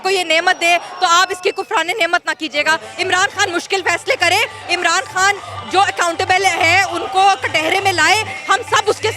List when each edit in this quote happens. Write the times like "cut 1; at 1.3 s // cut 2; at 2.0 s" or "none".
none